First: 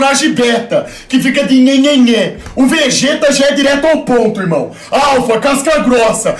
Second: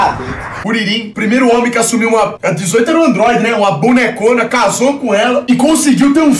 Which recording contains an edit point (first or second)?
second